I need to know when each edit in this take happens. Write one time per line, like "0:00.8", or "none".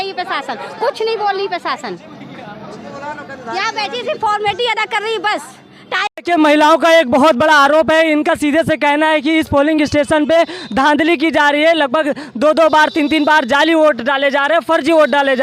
0:06.1